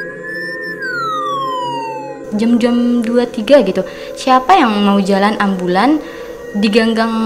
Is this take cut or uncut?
uncut